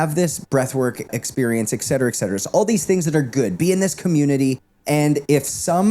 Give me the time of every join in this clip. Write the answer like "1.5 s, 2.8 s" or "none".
1.1 s, 4.7 s